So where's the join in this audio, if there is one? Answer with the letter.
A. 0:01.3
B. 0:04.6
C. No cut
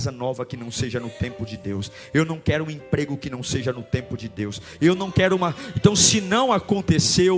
C